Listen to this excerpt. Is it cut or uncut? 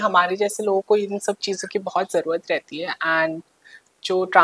uncut